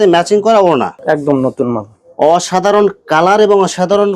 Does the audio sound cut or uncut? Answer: cut